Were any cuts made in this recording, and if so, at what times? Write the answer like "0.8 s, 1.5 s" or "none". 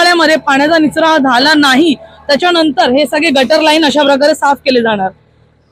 none